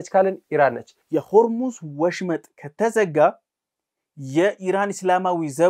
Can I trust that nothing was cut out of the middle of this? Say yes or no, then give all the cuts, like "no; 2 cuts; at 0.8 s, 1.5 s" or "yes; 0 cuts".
no; 1 cut; at 0.9 s